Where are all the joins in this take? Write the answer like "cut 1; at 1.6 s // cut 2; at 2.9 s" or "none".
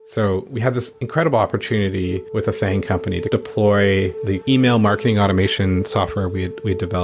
cut 1; at 1.0 s // cut 2; at 2.2 s